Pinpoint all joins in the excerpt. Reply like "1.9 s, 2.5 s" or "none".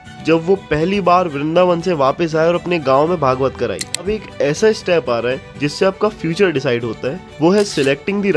4.0 s